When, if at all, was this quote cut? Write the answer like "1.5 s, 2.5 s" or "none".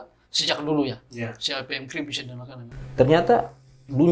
2.6 s